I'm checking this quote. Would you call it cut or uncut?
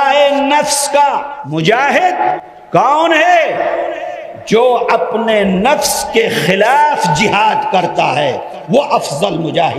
cut